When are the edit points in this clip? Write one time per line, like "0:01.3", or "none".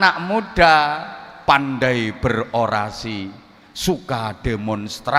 none